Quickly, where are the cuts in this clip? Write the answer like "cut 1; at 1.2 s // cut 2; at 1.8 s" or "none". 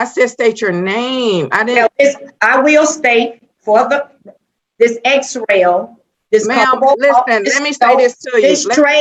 none